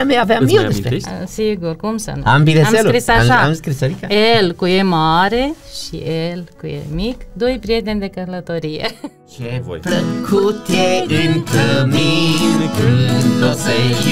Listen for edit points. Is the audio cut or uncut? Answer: cut